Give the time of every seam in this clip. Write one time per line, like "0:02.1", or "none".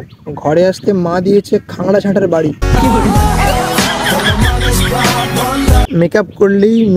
0:05.9

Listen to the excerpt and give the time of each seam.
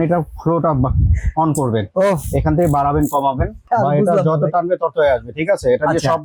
0:03.6

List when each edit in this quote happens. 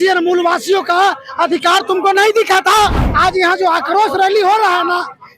0:03.0

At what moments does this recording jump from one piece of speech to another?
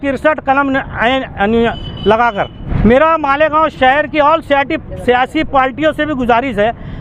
none

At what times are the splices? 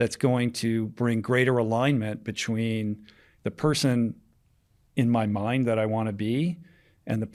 none

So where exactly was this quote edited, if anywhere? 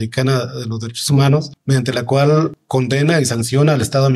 0:01.5
0:02.6

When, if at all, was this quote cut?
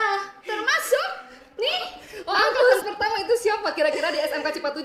0:02.8

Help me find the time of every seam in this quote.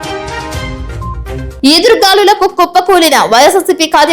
none

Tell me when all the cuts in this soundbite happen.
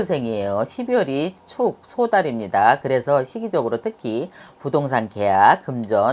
none

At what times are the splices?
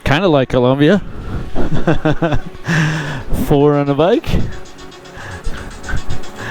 none

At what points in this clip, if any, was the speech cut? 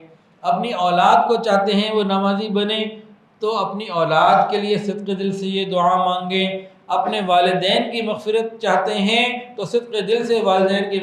none

